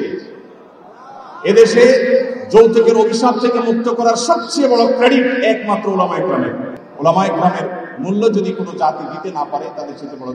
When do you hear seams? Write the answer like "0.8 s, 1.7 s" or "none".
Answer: 6.8 s